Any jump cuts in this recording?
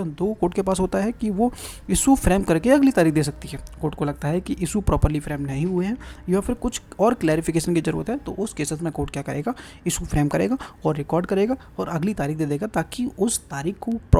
no; 0 cuts

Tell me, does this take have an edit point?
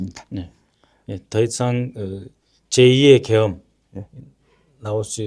no; 0 cuts

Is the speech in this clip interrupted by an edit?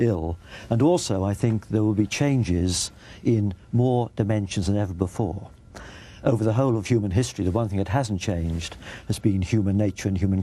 yes; 1 cut; at 1.3 s

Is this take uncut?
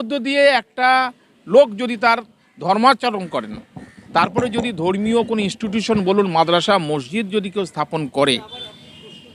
yes; 0 cuts

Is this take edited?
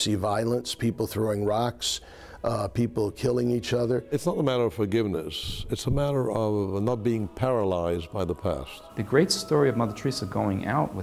yes; 2 cuts; at 4.1 s, 8.9 s

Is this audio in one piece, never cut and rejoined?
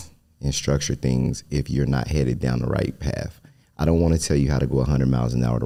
yes; 0 cuts

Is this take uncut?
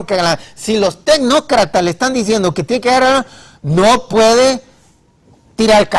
yes; 0 cuts

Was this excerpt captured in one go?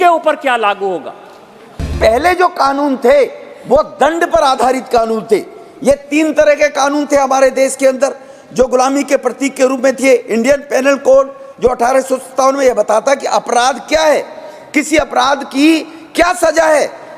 no; 1 cut; at 1.8 s

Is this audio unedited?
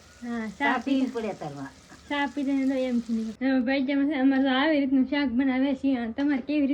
no; 1 cut; at 3.3 s

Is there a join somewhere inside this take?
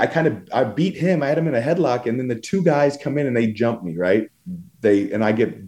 no; 0 cuts

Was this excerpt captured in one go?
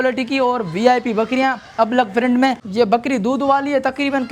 no; 1 cut; at 2.6 s

